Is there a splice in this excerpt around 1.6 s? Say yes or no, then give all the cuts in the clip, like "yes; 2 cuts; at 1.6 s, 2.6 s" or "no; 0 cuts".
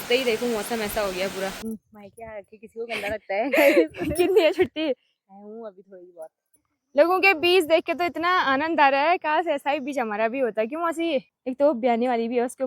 yes; 3 cuts; at 1.6 s, 6.7 s, 11.4 s